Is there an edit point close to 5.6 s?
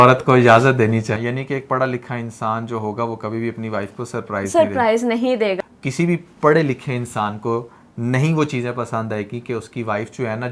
yes; 2 cuts; at 1.1 s, 5.6 s

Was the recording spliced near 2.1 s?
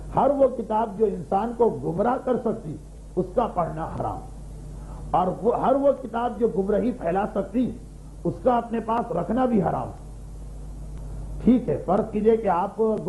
no; 0 cuts

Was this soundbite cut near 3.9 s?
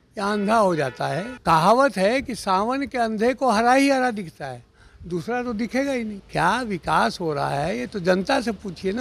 no; 2 cuts; at 1.3 s, 6.2 s

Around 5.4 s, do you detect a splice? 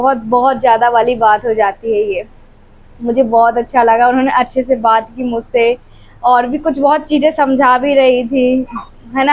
no; 0 cuts

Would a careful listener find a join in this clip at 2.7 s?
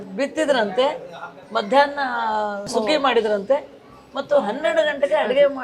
yes; 1 cut; at 2.7 s

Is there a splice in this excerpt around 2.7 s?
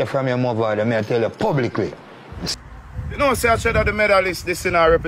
yes; 1 cut; at 2.7 s

